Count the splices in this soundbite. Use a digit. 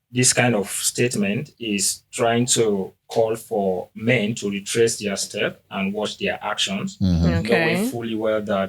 0